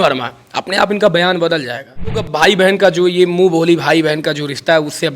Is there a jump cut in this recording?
yes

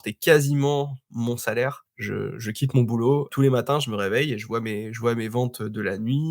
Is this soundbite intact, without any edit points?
no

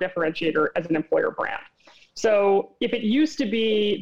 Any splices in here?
no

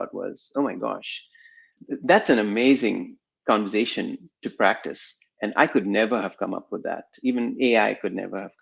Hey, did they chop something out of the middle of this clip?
yes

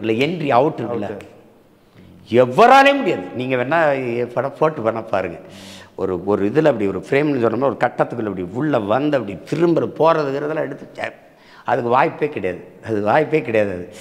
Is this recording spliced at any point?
no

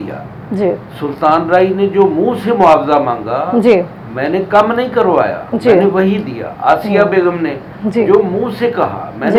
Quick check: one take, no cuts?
yes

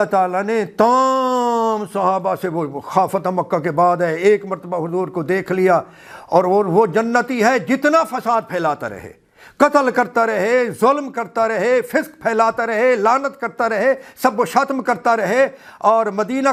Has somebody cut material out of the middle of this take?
no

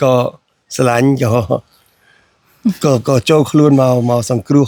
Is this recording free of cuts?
yes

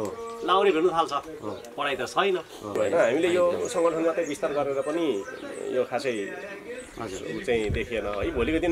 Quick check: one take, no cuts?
no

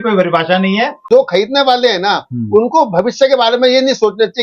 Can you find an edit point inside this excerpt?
yes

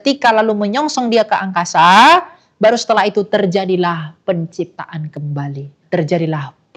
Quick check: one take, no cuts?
no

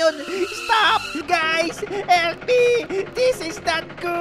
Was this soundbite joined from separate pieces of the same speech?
yes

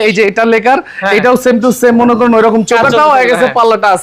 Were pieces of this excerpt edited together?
no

